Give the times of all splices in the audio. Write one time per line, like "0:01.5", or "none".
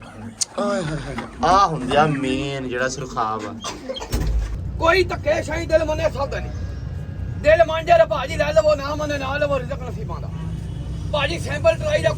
0:04.5